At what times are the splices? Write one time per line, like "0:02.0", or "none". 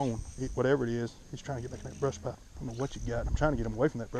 0:02.4